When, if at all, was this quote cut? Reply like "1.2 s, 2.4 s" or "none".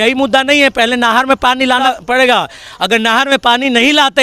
1.8 s